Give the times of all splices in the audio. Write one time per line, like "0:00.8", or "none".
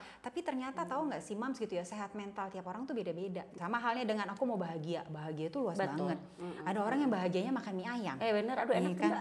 0:03.6